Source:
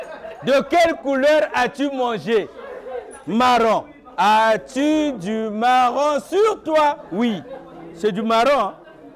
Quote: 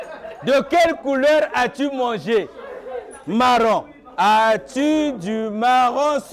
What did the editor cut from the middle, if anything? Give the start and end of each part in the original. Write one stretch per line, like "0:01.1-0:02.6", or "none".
none